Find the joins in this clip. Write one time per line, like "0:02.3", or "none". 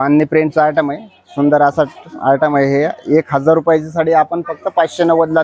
none